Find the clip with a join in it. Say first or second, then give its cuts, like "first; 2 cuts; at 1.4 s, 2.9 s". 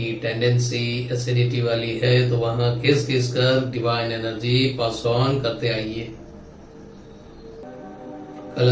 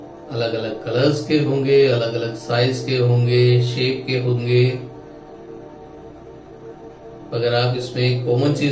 first; 1 cut; at 7.6 s